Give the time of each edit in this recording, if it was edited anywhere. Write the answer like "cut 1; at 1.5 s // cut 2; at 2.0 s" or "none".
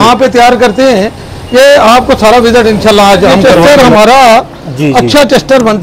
cut 1; at 3.6 s